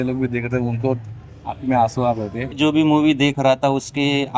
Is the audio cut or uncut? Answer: cut